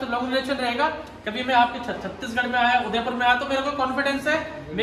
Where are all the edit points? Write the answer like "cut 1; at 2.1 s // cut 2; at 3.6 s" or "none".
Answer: none